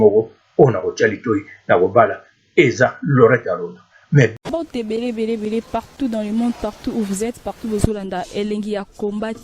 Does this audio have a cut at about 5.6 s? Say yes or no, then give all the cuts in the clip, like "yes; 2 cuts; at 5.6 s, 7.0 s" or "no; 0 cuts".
no; 1 cut; at 4.3 s